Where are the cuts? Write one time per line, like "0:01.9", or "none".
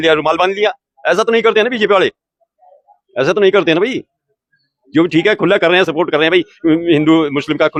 none